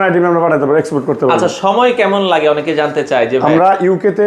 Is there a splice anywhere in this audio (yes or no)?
no